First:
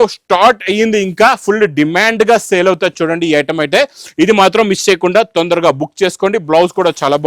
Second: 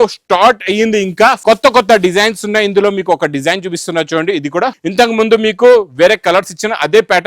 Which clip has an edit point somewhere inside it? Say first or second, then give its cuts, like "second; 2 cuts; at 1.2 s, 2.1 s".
second; 2 cuts; at 1.4 s, 4.8 s